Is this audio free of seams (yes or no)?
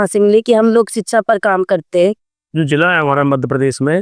no